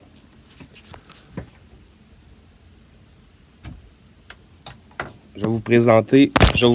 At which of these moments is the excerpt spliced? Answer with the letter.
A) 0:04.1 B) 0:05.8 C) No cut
C